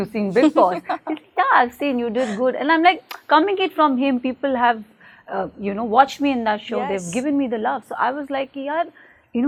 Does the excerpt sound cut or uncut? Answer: uncut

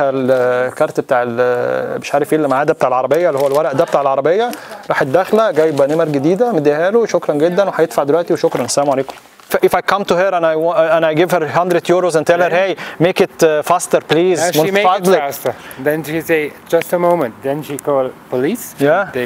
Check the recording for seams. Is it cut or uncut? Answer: cut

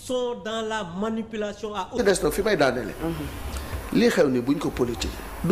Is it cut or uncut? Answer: uncut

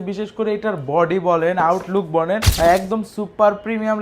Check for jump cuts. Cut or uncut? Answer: cut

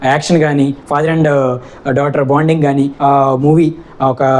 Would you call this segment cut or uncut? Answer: cut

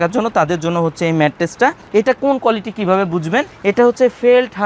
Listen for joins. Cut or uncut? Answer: uncut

